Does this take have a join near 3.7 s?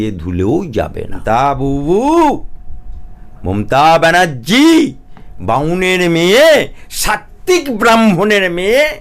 no; 1 cut; at 1.2 s

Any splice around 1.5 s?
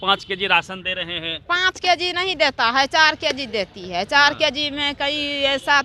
yes; 1 cut; at 1.5 s

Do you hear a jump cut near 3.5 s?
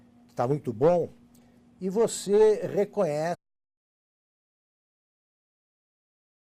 no; 0 cuts

